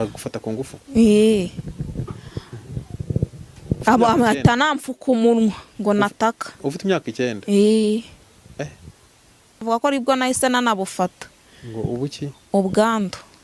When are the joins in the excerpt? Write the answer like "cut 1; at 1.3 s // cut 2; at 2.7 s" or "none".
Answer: cut 1; at 3.8 s // cut 2; at 9.6 s